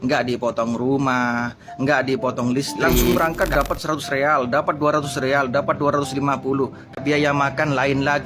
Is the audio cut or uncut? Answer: cut